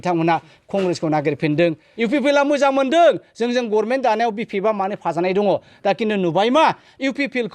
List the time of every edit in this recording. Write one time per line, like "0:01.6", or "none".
0:01.9